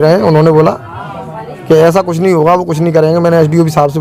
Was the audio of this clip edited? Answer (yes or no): no